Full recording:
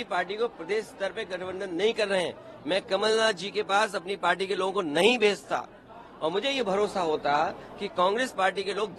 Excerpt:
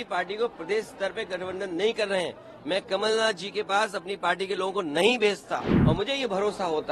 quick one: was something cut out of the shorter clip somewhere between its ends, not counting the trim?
yes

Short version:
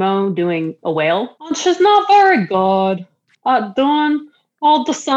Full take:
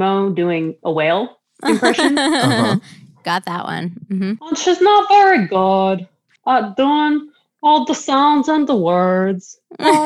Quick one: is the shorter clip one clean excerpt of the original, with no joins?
no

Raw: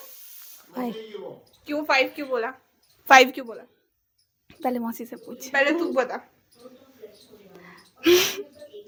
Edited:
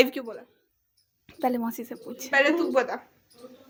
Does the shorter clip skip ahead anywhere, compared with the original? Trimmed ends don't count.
no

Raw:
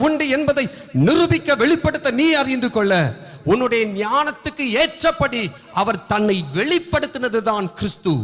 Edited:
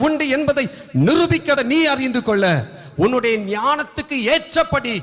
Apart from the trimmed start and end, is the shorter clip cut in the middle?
yes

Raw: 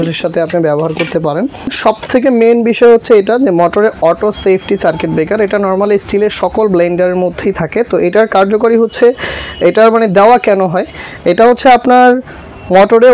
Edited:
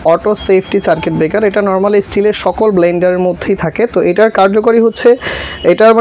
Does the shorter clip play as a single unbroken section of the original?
yes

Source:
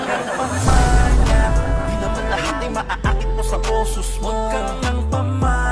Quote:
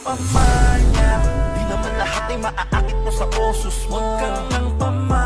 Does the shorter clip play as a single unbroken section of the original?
yes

